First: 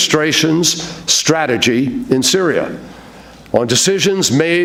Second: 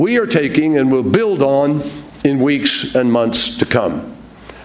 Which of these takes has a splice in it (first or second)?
second